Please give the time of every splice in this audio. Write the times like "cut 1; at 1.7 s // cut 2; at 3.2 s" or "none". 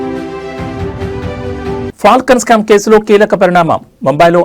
cut 1; at 1.6 s